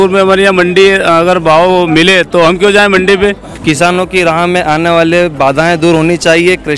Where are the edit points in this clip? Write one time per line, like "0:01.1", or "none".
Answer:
0:03.5